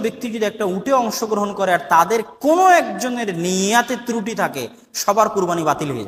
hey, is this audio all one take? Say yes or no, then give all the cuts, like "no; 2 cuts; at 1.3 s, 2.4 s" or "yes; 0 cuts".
yes; 0 cuts